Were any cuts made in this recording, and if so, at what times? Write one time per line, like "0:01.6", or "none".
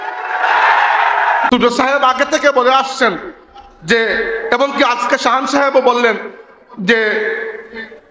0:01.5

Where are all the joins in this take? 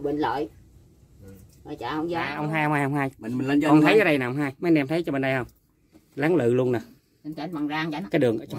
0:02.4

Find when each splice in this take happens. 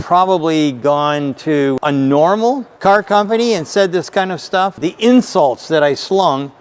0:01.8
0:02.7
0:04.8

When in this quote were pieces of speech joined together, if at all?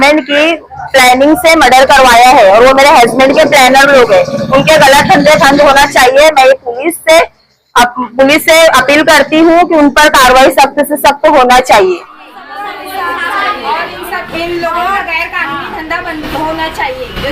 0:12.5

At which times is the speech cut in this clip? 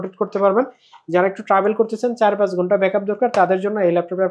none

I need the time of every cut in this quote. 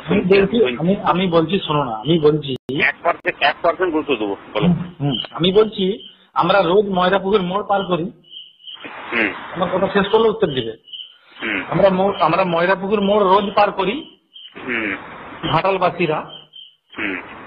none

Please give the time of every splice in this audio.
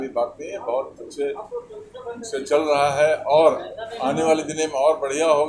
none

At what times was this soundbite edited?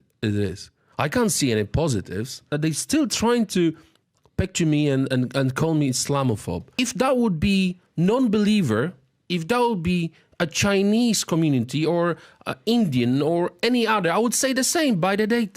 0:02.5
0:06.7

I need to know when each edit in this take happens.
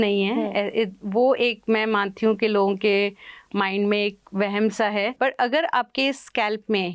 0:05.1

